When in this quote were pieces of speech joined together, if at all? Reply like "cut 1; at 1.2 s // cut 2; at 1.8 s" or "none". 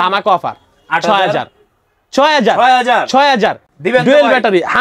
none